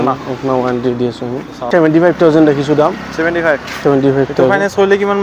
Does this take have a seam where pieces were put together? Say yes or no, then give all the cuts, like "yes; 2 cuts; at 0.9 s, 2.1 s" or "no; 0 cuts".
yes; 1 cut; at 1.7 s